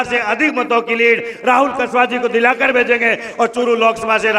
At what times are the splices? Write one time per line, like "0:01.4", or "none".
none